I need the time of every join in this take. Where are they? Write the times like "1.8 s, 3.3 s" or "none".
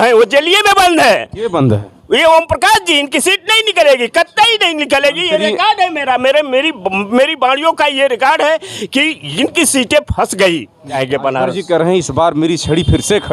11.0 s